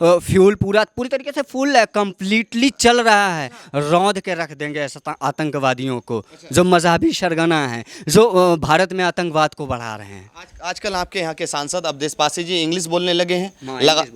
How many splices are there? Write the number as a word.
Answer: zero